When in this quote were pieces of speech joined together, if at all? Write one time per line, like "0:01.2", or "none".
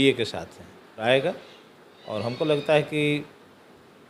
0:01.0